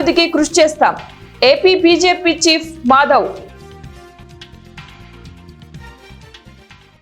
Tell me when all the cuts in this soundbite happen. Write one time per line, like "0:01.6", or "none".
0:04.1
0:05.6

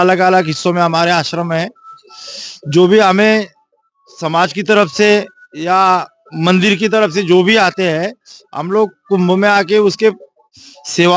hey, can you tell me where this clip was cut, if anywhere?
none

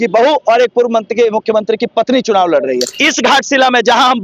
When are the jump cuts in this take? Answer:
0:03.0

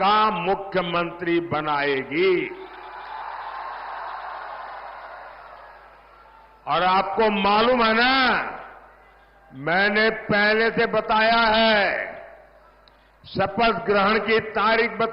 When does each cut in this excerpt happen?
none

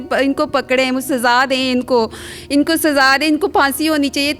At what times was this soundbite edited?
none

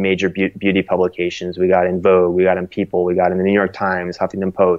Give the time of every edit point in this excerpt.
none

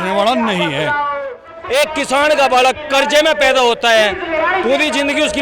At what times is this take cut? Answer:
0:01.5

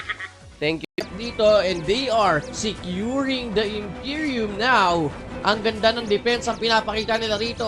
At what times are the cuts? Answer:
0:00.9

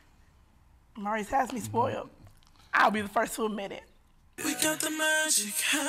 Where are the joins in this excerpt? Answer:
0:04.3

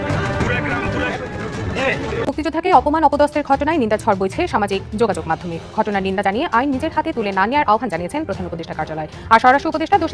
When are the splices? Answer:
0:01.1

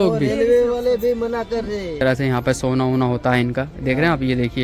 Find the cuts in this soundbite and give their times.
0:02.0

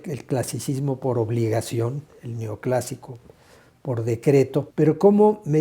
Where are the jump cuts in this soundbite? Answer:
0:04.7

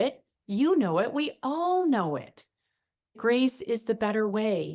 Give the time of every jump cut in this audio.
0:03.2

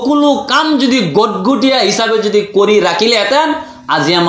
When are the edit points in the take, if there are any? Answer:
none

